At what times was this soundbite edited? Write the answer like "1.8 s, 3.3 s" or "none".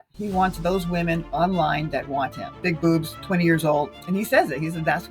2.6 s, 4.0 s